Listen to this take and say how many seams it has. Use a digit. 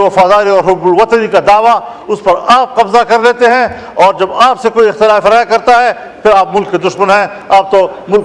0